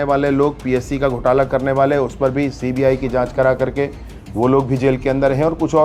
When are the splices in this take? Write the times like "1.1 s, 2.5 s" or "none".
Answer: none